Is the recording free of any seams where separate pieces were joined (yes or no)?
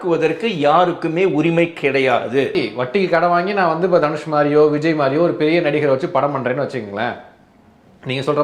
no